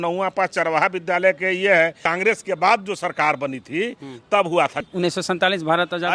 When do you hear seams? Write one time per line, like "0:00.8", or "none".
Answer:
0:02.0
0:04.9

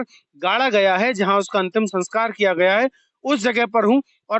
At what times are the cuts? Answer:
none

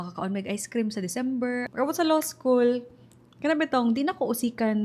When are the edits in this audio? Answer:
0:01.7

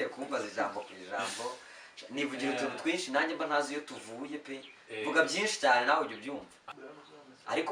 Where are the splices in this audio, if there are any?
0:06.7

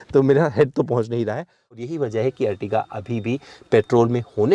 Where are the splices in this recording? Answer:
0:01.8

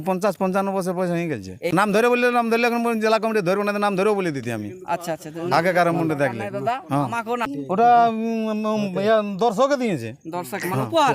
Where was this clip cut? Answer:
0:01.6
0:07.5

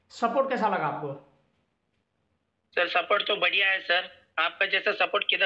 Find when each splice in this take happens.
none

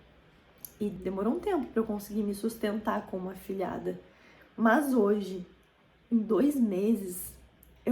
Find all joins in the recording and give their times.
0:00.9

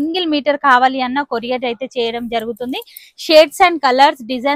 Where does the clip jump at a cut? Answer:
none

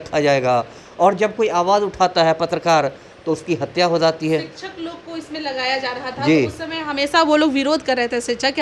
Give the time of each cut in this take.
none

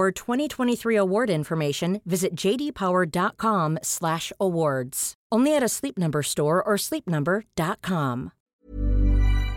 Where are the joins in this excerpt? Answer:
0:08.7

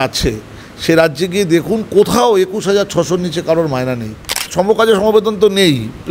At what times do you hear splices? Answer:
0:04.4

